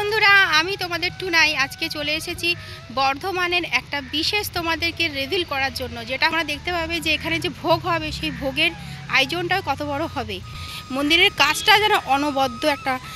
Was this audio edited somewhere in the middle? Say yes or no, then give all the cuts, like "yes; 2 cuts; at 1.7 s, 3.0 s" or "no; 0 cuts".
yes; 1 cut; at 6.3 s